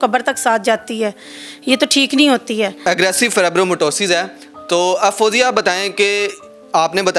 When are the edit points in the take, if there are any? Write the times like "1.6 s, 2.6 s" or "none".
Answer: none